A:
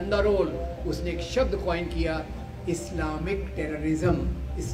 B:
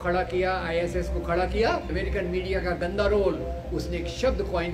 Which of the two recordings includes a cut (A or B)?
B